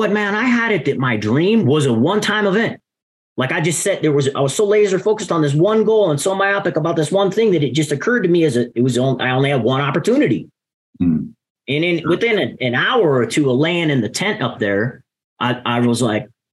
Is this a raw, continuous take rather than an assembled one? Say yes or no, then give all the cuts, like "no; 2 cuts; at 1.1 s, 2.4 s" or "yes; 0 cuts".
no; 1 cut; at 1.6 s